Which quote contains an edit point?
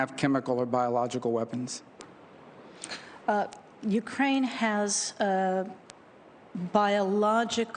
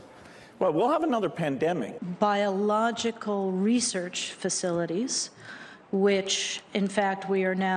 second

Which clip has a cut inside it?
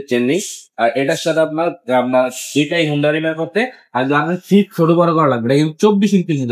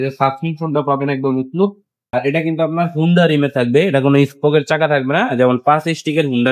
second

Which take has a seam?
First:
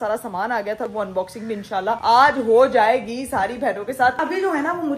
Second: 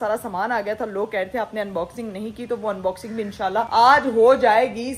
first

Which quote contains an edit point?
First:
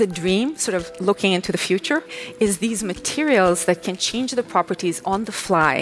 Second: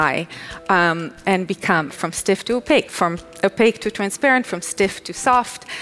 second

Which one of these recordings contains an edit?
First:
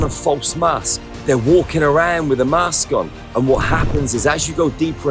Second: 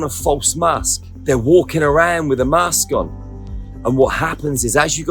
first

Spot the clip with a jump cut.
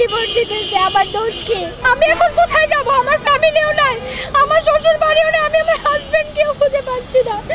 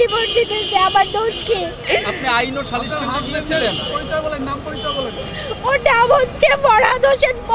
first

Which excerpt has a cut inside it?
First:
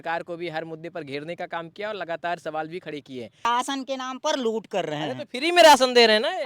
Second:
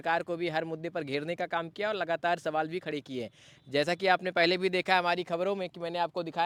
first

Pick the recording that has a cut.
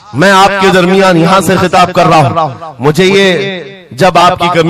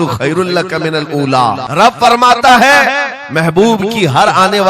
second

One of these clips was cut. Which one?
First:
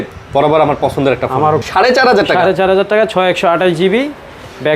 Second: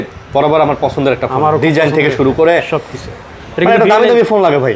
first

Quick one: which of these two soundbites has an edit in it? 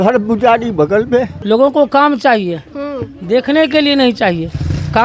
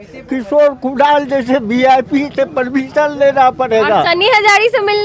first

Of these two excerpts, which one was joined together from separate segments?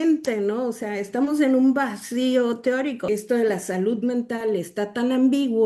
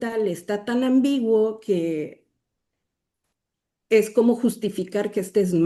first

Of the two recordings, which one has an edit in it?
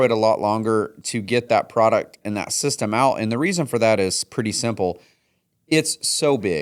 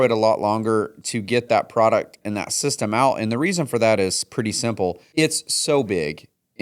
second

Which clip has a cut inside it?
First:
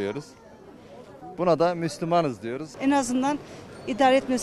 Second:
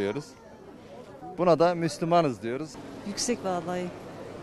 first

